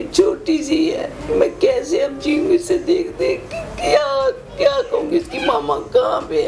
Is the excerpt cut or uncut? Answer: uncut